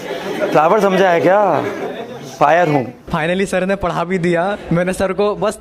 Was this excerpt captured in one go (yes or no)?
no